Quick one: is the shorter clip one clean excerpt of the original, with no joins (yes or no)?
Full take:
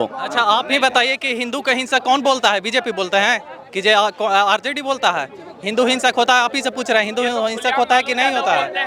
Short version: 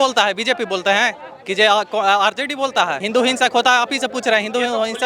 no